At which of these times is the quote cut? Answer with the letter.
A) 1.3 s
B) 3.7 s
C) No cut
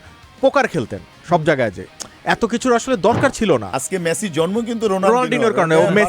B